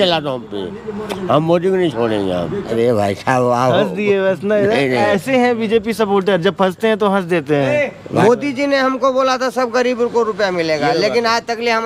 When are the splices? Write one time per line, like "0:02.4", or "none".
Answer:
0:02.6
0:08.2